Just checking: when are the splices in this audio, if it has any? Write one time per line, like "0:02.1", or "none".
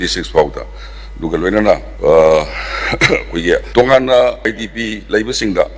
0:01.9
0:03.7
0:04.5